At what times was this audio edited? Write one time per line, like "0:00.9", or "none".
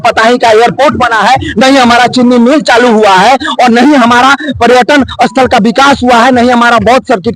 none

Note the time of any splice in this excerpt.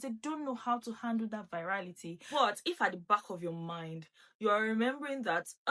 0:02.2

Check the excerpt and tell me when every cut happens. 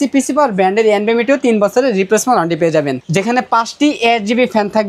0:03.1

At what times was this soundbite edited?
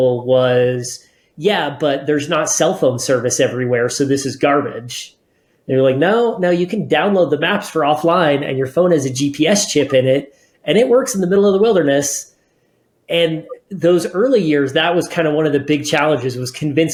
none

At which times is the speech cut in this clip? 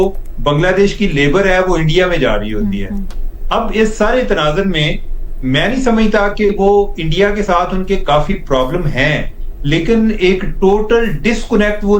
none

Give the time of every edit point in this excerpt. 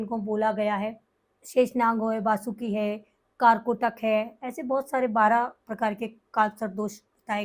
none

